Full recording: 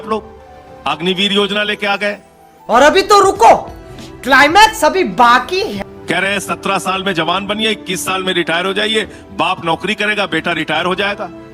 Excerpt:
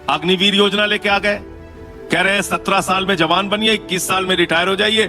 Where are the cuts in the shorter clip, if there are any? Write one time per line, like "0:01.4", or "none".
0:01.8